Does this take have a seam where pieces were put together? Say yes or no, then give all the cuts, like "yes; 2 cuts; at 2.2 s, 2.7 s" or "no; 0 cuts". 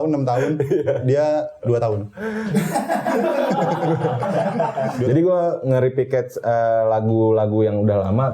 yes; 1 cut; at 5.0 s